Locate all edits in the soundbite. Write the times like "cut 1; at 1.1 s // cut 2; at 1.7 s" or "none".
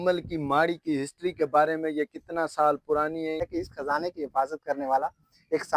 cut 1; at 3.5 s